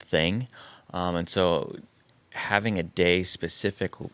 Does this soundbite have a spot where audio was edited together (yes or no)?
no